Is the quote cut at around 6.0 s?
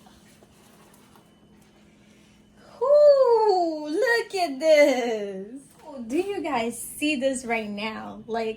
yes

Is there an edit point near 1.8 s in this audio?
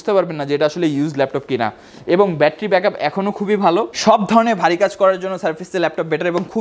no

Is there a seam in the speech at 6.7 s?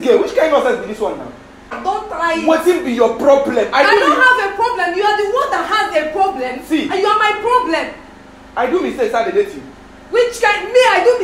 no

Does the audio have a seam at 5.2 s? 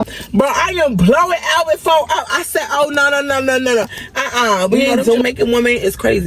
yes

